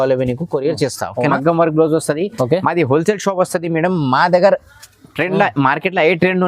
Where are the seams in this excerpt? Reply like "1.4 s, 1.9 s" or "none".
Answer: 1.3 s